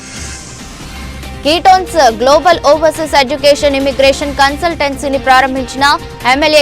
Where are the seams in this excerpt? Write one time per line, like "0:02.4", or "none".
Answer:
0:01.3

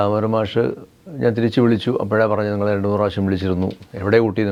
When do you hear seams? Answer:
none

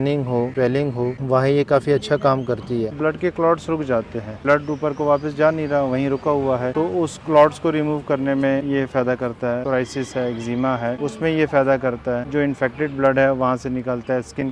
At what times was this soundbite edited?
0:02.9
0:04.4
0:08.6
0:09.6
0:12.3

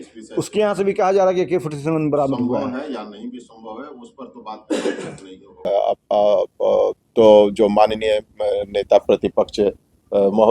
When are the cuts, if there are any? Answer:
0:05.7

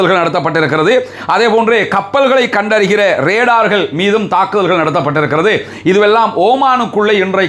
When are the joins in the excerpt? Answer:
none

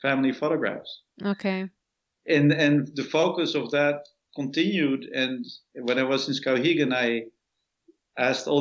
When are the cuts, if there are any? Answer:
none

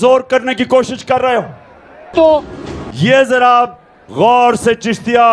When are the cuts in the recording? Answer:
0:02.1

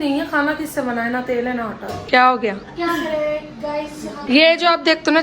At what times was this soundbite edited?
0:02.0
0:04.2

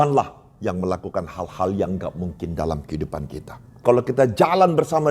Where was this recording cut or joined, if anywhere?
0:03.8

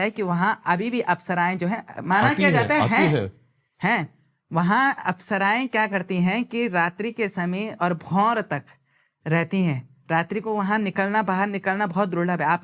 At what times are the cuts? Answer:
none

